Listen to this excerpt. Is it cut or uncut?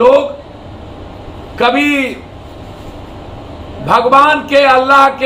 uncut